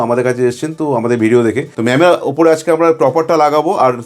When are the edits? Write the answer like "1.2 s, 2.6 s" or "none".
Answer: 1.7 s

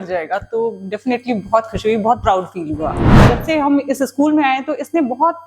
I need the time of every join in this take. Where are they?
3.1 s

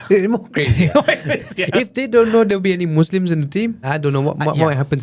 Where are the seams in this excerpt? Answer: 3.8 s

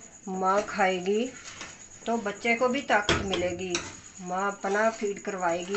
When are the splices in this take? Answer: none

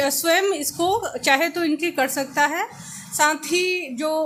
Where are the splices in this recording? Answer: none

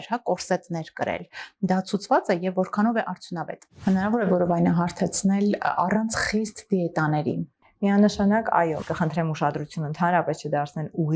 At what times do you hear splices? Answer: 3.6 s, 8.8 s

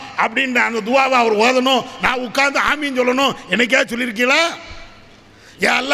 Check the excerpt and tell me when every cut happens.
none

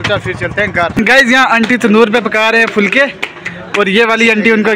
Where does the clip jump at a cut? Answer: 1.0 s

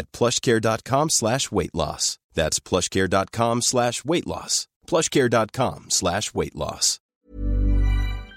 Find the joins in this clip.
7.2 s

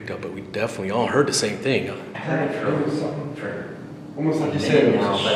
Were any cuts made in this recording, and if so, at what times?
2.1 s

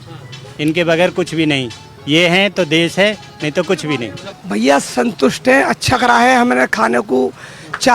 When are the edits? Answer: 4.2 s

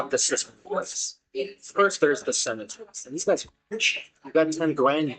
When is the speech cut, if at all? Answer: none

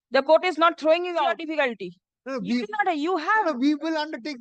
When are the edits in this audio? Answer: 1.1 s

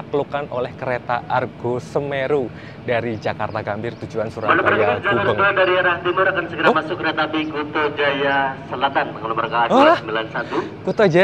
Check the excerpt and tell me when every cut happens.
none

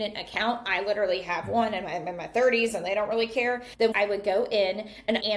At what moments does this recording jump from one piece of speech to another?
3.7 s

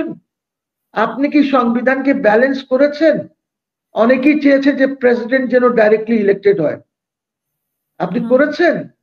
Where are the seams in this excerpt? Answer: none

